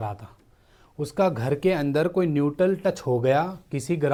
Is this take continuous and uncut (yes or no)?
yes